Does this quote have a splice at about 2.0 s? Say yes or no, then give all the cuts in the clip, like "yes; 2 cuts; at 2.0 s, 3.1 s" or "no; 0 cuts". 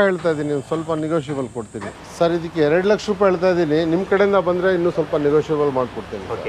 yes; 1 cut; at 2.0 s